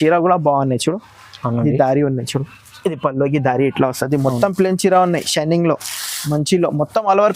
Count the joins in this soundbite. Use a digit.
0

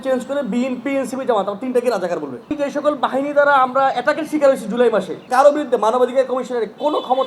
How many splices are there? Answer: 2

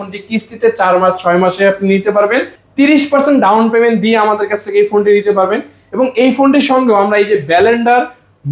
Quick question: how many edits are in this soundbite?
1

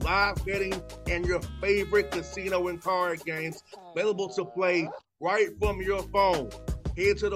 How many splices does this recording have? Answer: 0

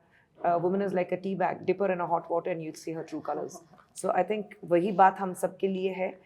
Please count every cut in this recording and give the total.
0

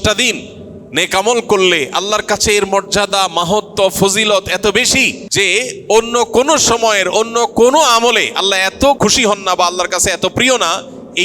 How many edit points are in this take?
2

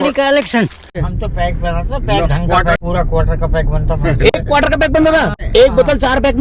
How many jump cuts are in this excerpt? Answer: 3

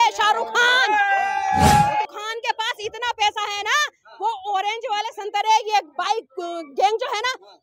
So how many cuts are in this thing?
1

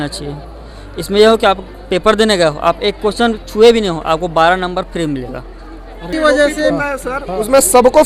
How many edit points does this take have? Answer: 0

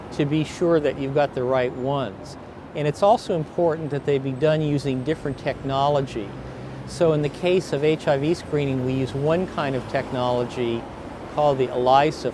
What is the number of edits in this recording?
1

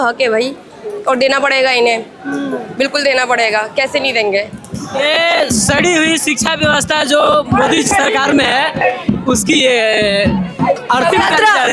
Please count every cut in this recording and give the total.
1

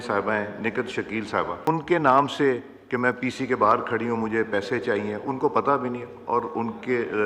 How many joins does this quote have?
1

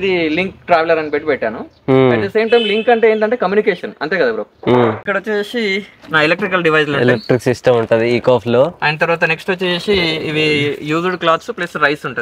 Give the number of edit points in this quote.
1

